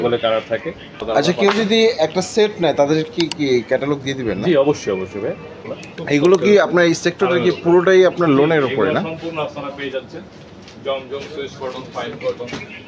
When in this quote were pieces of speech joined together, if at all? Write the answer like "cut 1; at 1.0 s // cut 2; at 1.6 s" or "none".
cut 1; at 1.0 s // cut 2; at 5.6 s